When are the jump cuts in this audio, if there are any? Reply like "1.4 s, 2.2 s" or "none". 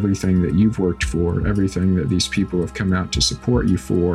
none